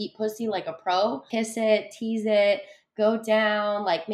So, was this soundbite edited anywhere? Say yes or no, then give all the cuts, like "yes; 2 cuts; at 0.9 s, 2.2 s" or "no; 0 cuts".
yes; 1 cut; at 1.3 s